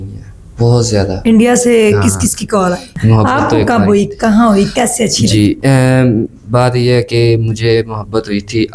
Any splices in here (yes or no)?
yes